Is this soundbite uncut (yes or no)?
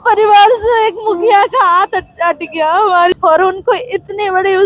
no